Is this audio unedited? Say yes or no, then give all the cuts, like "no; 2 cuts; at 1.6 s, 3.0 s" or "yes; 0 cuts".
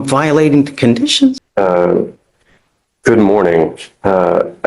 no; 1 cut; at 1.4 s